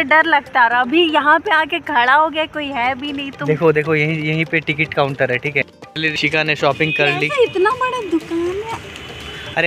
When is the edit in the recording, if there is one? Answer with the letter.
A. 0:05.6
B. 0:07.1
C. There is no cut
A